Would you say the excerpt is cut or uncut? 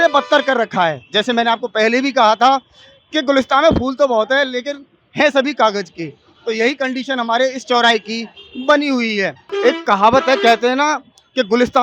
cut